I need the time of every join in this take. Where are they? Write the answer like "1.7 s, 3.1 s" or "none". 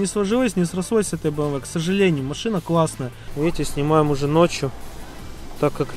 3.2 s